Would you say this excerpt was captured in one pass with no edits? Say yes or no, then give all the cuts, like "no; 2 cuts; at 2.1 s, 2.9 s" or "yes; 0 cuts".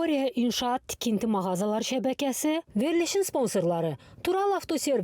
yes; 0 cuts